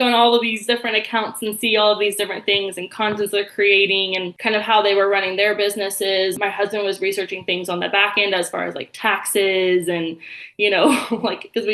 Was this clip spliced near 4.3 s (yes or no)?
yes